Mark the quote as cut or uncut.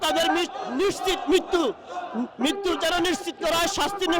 uncut